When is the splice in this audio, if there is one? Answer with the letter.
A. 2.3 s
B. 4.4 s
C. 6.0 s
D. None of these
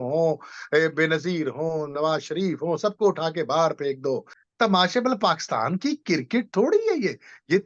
B